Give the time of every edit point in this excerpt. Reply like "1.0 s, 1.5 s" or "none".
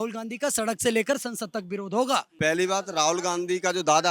2.3 s

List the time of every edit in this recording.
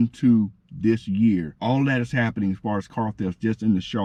none

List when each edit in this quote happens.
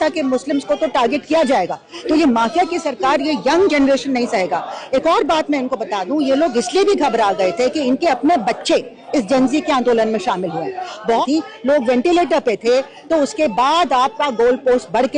1.8 s, 11.2 s

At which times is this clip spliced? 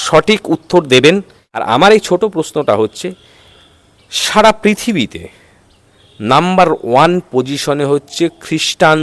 1.5 s

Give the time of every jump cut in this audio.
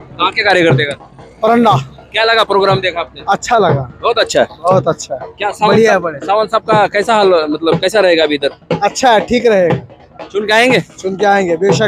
none

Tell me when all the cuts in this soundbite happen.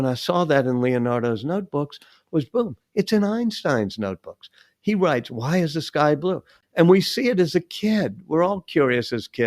6.5 s

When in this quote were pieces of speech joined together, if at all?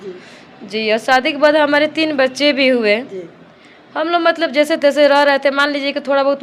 none

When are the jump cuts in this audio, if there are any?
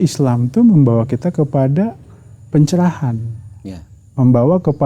none

